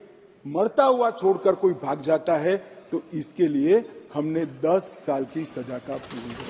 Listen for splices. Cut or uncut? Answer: uncut